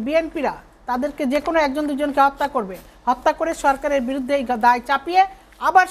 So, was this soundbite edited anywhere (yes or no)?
no